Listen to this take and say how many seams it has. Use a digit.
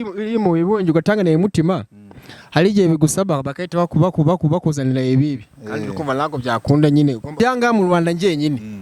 1